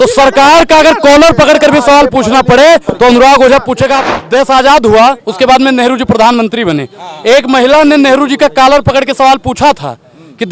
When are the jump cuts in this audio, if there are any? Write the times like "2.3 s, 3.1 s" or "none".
4.0 s